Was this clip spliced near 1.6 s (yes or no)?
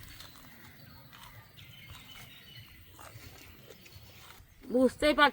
yes